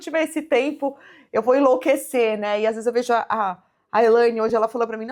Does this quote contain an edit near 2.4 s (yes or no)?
no